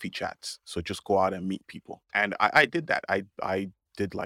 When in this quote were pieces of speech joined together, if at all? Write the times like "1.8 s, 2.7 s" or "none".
2.0 s